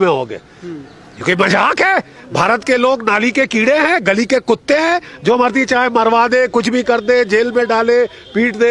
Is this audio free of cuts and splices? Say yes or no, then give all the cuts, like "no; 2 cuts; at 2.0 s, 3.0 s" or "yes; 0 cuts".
yes; 0 cuts